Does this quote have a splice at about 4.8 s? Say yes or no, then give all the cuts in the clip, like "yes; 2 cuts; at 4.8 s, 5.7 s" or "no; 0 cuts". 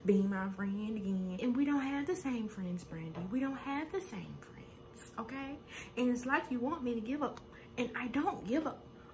no; 1 cut; at 1.4 s